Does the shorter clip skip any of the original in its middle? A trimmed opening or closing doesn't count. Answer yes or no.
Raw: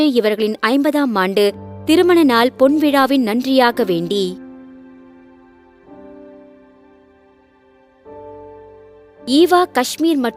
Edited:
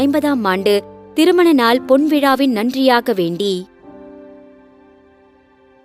yes